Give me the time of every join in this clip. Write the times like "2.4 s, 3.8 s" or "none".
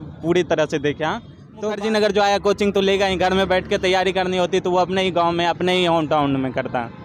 1.8 s